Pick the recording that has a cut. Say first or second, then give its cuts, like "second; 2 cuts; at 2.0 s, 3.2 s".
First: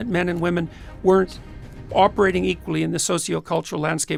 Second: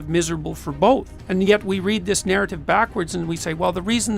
second; 1 cut; at 1.2 s